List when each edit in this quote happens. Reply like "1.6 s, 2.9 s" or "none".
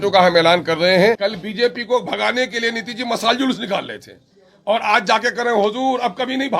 1.2 s